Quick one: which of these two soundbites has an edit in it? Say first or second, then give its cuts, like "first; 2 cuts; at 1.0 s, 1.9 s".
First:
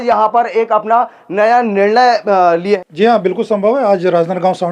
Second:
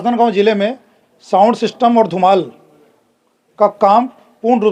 first; 1 cut; at 2.8 s